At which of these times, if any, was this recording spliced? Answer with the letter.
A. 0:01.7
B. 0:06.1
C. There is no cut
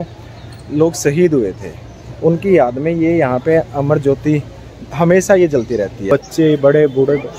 B